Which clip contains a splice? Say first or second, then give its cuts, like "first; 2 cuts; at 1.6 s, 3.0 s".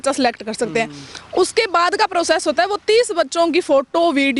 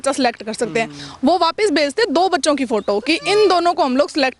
second; 1 cut; at 1.0 s